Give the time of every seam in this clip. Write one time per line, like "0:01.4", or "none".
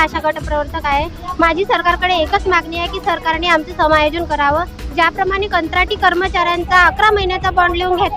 none